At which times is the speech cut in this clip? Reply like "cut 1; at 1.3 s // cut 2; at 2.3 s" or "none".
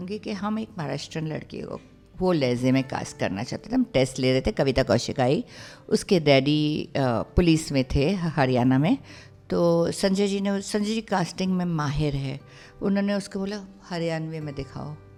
none